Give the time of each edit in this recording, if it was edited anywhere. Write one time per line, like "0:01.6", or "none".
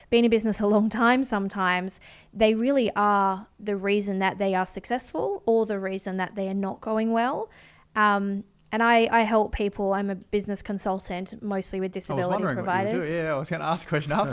none